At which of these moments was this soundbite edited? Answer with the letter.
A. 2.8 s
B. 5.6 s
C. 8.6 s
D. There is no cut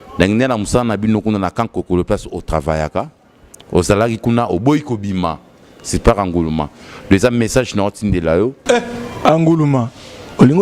C